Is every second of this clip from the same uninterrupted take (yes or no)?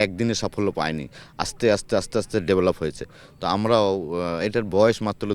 yes